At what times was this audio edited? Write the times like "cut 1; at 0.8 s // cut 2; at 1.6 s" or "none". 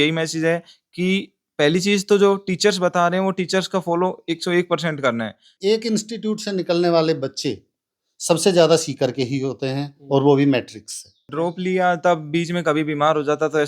cut 1; at 5.5 s // cut 2; at 11.3 s